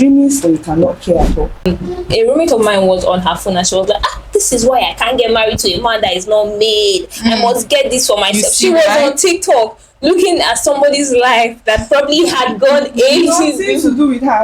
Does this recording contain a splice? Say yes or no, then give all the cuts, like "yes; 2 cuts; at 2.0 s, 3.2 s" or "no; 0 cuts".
yes; 1 cut; at 1.7 s